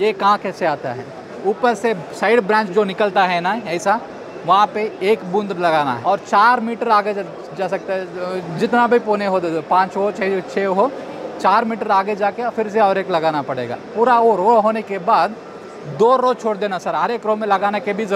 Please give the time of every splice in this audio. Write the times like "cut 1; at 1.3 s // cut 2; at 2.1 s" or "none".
cut 1; at 1.2 s // cut 2; at 6.0 s // cut 3; at 13.8 s